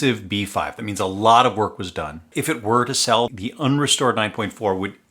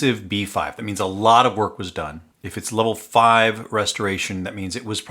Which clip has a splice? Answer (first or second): first